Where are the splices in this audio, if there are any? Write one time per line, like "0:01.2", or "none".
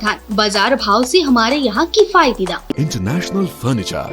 0:02.7